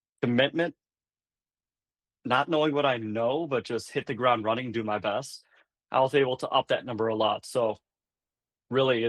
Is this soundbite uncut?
yes; 0 cuts

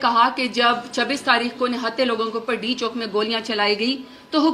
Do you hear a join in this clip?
no; 0 cuts

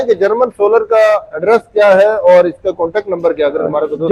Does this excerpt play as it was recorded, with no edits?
yes; 0 cuts

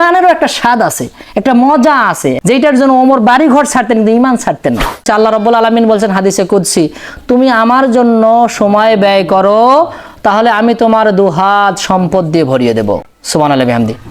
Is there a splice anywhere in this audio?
yes; 2 cuts; at 2.4 s, 5.1 s

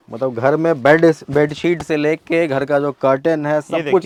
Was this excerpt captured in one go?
yes; 0 cuts

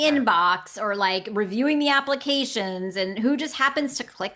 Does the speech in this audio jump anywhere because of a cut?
no; 0 cuts

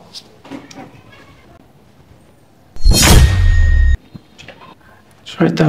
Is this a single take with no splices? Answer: no; 1 cut; at 1.6 s

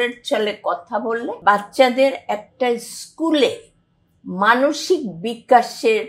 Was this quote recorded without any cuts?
no; 1 cut; at 1.3 s

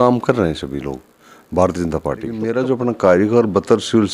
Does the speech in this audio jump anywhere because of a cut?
yes; 1 cut; at 2.5 s

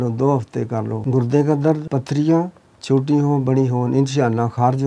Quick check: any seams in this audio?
yes; 2 cuts; at 1.0 s, 1.9 s

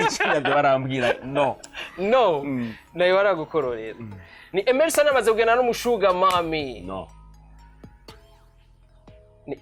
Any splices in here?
no; 0 cuts

